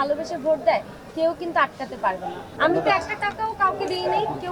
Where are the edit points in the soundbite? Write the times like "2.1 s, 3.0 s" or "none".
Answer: 2.5 s